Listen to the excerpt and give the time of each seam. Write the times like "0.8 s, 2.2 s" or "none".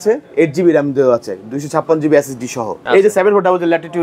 2.8 s